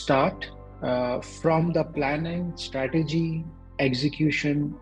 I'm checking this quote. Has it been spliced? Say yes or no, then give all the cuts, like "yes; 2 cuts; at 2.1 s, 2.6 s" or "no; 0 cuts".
no; 0 cuts